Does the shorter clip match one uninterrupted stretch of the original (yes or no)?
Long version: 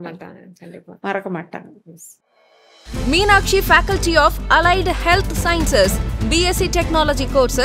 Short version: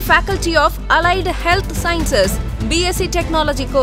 yes